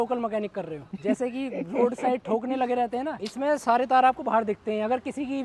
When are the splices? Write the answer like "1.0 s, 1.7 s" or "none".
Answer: 0.9 s, 3.2 s